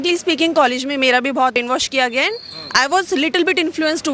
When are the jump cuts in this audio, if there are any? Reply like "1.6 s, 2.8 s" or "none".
1.6 s